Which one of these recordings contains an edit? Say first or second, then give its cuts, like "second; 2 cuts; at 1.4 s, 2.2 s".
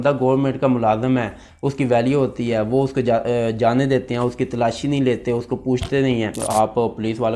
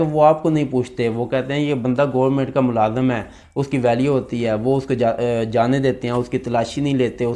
first; 1 cut; at 6.4 s